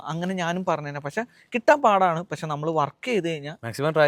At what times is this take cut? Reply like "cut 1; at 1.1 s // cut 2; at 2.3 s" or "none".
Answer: none